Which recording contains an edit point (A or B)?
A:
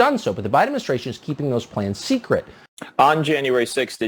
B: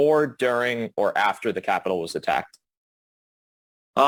A